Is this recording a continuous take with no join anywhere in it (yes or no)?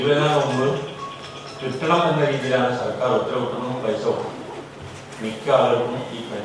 yes